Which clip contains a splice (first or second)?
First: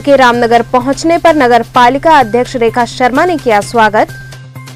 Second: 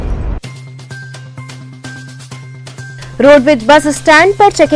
second